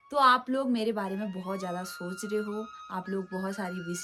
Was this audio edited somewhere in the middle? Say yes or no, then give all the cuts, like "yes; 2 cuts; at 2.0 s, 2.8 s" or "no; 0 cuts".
no; 0 cuts